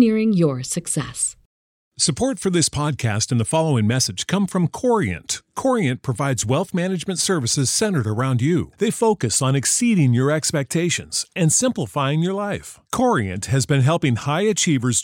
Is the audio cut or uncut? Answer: cut